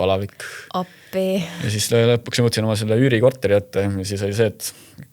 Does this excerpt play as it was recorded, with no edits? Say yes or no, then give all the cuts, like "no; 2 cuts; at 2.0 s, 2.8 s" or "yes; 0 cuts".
no; 1 cut; at 1.4 s